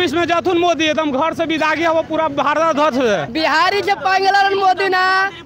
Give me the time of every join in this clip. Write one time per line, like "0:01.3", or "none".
0:03.3

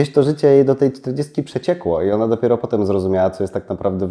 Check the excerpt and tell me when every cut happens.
none

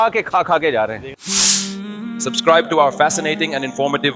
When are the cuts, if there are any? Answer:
0:01.1

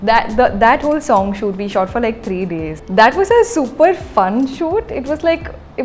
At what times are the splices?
0:02.8

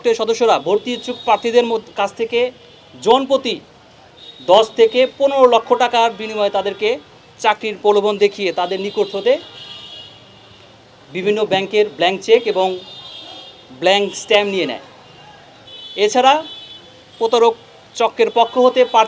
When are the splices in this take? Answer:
none

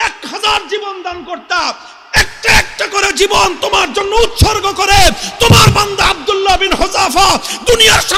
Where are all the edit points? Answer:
none

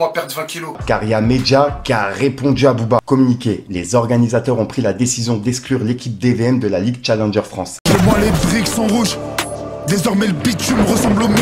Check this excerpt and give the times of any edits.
0:00.8
0:03.6
0:07.9

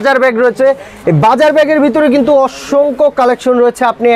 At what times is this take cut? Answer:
none

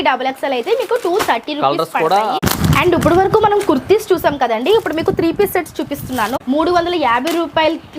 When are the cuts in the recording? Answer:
0:02.4
0:06.3

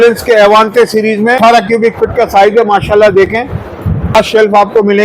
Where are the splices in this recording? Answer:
0:01.4
0:04.2

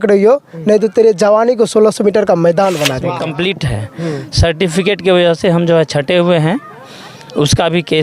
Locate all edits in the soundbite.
0:03.1

